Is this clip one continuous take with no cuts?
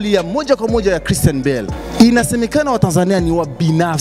no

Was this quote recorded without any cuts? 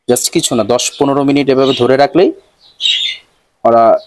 yes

